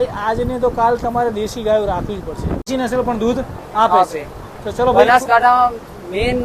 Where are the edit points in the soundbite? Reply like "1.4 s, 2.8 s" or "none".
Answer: 2.7 s